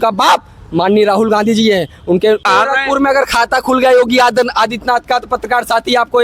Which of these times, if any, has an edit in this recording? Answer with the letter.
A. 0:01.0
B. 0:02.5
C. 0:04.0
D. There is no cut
B